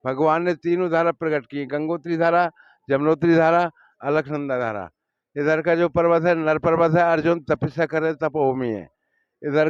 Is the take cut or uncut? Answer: uncut